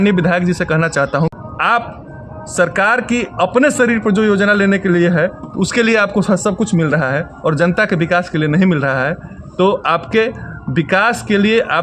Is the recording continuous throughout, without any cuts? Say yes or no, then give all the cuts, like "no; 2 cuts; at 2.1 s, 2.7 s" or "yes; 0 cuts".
no; 1 cut; at 1.3 s